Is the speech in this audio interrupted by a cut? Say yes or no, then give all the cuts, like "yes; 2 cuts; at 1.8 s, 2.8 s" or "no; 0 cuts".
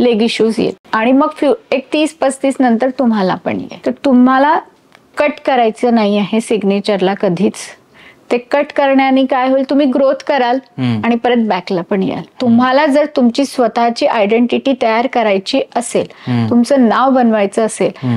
yes; 3 cuts; at 0.8 s, 3.7 s, 12.3 s